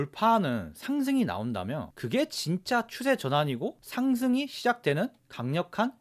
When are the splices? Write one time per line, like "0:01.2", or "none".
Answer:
none